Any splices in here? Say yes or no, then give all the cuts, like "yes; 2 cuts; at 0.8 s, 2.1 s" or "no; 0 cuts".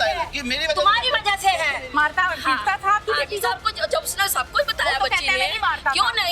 yes; 1 cut; at 1.9 s